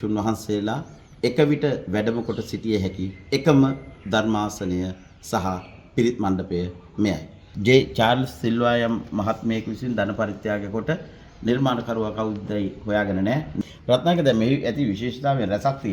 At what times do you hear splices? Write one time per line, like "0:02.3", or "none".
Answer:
0:07.4
0:13.6